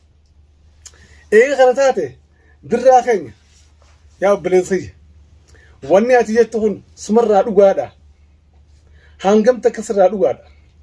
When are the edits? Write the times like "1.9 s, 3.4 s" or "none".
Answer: none